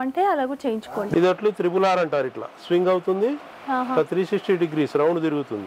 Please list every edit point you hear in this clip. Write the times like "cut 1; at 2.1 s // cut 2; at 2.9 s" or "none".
cut 1; at 0.9 s